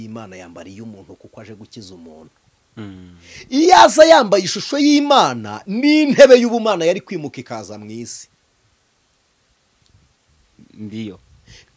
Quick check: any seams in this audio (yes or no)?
no